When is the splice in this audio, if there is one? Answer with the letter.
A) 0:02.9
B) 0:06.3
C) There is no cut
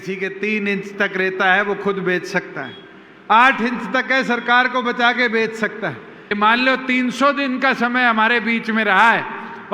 B